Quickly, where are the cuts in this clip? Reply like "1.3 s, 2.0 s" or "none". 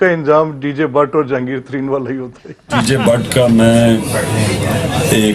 2.7 s